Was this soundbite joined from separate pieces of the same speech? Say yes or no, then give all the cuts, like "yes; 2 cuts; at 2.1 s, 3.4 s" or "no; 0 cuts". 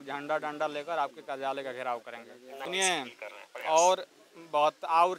yes; 1 cut; at 2.7 s